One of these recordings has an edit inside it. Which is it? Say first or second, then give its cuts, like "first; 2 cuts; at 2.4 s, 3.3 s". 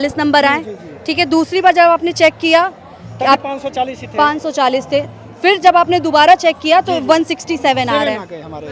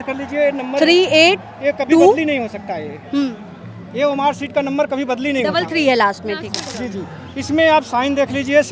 second; 1 cut; at 6.7 s